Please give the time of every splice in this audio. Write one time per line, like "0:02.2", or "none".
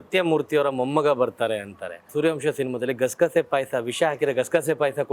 0:02.1